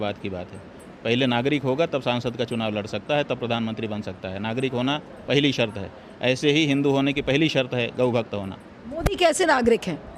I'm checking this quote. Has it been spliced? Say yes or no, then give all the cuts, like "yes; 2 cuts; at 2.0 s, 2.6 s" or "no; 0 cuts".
no; 0 cuts